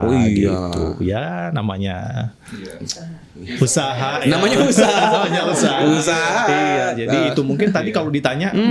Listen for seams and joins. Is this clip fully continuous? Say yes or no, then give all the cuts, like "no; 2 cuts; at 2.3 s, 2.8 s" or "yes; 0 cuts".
yes; 0 cuts